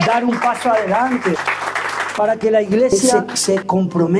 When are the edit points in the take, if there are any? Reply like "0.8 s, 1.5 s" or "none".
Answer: 1.4 s, 3.0 s

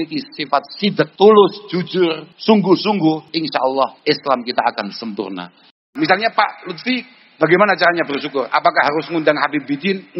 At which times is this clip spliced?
1.1 s, 2.3 s, 3.6 s, 5.8 s

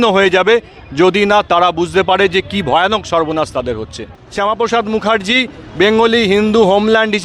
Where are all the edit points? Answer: 4.2 s

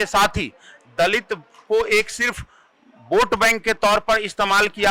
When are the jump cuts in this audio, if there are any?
none

